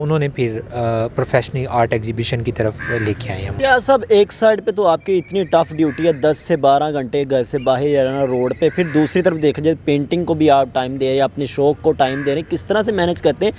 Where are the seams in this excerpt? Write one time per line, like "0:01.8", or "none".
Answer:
0:03.4